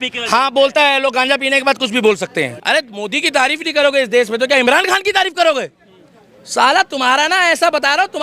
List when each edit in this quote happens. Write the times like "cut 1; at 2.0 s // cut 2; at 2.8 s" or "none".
cut 1; at 2.6 s